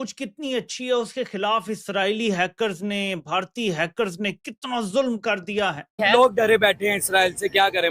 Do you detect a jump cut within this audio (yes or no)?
yes